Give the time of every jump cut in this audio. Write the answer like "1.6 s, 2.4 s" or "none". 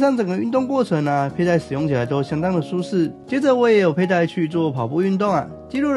3.2 s